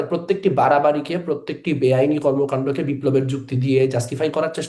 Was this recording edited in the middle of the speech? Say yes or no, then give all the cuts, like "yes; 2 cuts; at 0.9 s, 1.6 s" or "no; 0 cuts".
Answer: no; 0 cuts